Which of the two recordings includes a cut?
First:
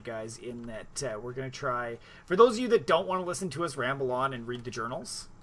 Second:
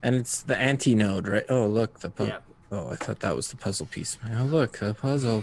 second; 1 cut; at 3.1 s

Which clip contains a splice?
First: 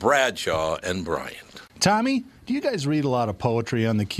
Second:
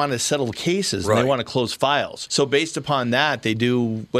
first; 1 cut; at 1.6 s

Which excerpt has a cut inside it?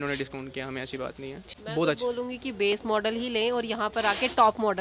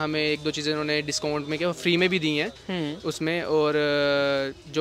first; 1 cut; at 1.4 s

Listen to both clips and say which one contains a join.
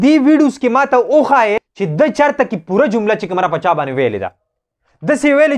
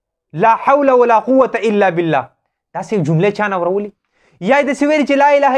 first; 1 cut; at 1.5 s

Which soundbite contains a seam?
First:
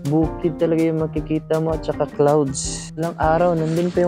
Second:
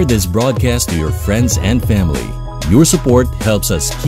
first; 1 cut; at 2.6 s

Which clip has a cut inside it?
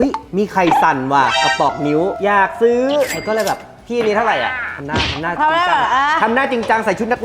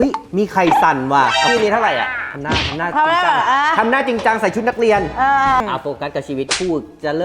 second; 2 cuts; at 1.5 s, 5.6 s

